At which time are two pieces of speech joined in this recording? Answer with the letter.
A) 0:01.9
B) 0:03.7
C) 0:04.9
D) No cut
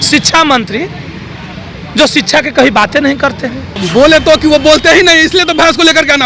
B